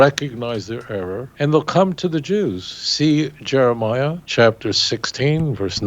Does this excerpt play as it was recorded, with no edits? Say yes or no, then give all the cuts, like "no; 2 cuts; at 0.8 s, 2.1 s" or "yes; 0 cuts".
no; 2 cuts; at 1.2 s, 4.2 s